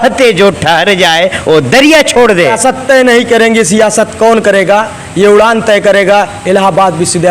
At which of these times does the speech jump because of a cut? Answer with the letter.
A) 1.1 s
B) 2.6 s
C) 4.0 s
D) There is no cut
B